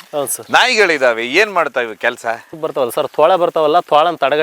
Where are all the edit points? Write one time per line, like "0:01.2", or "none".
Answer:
0:02.5